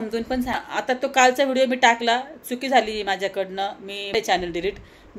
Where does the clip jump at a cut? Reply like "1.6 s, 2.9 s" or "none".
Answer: 0.8 s, 4.1 s